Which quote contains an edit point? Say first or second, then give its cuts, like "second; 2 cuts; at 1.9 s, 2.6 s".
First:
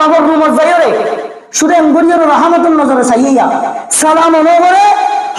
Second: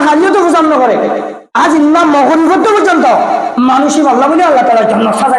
second; 1 cut; at 1.4 s